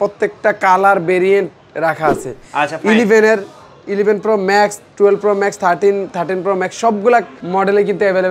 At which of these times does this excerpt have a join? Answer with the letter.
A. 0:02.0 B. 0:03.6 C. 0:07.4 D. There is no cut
C